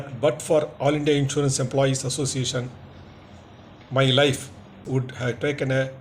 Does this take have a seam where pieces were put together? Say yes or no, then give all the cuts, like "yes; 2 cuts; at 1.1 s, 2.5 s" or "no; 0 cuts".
yes; 1 cut; at 4.8 s